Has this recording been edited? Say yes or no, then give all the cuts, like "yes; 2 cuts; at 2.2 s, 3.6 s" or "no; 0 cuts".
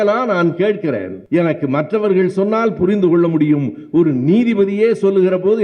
yes; 1 cut; at 1.1 s